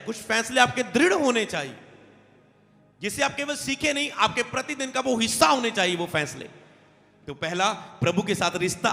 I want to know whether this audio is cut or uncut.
uncut